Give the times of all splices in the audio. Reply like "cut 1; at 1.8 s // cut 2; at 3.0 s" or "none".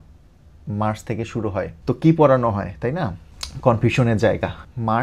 none